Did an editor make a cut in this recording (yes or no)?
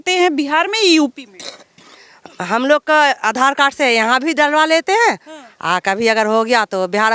no